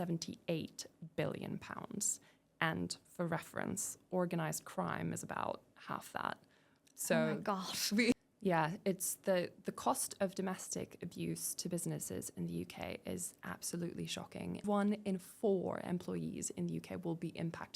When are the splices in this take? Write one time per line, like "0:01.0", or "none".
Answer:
0:08.1
0:14.6